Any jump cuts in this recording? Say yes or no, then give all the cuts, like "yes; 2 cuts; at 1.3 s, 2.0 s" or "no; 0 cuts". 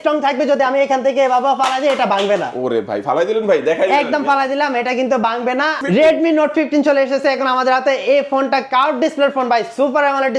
yes; 1 cut; at 5.8 s